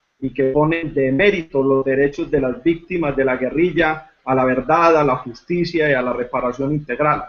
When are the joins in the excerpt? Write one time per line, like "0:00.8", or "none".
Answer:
none